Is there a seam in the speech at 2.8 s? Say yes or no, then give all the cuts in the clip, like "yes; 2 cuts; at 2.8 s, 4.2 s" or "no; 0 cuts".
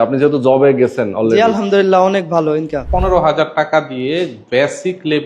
yes; 1 cut; at 2.8 s